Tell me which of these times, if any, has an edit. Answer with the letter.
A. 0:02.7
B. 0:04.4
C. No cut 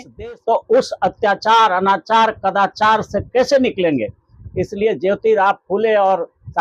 C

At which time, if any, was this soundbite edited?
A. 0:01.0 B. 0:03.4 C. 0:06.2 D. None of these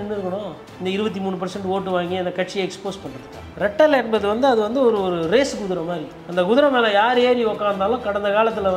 B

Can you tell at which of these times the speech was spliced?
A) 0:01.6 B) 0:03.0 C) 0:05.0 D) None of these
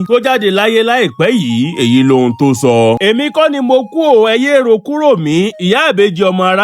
B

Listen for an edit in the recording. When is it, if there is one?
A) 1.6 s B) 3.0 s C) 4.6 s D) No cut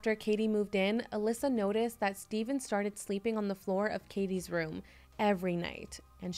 D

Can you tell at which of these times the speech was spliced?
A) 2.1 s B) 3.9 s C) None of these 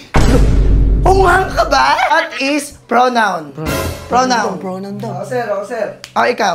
A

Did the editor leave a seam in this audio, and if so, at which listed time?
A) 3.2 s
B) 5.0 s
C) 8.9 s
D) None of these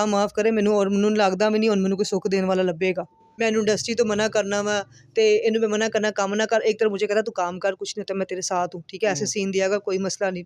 A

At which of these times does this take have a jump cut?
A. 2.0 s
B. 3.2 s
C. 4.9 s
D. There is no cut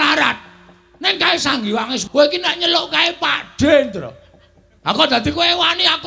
A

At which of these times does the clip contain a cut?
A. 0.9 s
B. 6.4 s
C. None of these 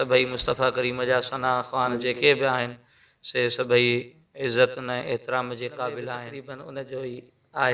B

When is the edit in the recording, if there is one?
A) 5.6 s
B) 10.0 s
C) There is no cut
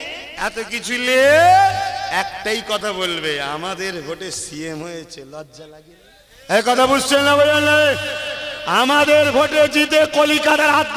A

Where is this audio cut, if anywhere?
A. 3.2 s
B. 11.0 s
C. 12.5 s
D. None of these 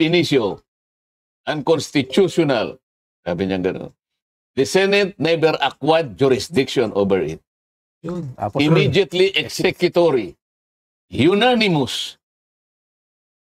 D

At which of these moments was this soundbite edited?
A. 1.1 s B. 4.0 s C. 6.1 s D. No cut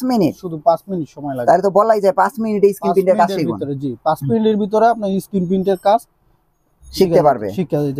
D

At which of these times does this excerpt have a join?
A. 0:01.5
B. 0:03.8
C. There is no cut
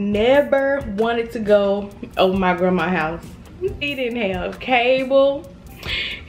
B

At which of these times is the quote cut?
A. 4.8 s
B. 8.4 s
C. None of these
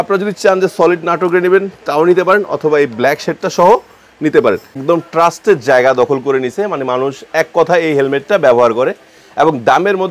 A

